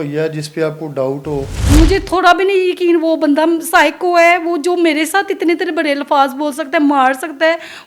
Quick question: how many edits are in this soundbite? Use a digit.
1